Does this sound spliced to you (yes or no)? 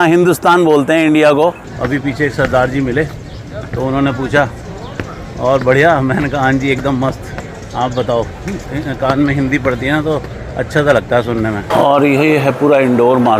yes